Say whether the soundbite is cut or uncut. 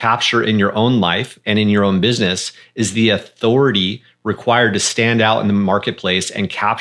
uncut